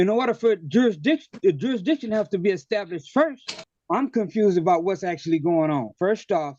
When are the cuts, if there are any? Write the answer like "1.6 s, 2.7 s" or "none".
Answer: 3.6 s